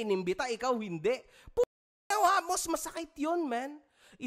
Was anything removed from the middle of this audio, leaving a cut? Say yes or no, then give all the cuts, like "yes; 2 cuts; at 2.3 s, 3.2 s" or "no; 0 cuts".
no; 0 cuts